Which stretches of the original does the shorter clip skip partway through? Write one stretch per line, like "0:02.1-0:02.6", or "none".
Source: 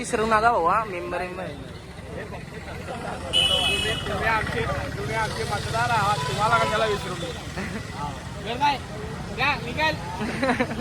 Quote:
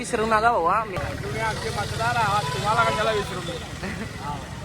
0:01.0-0:04.7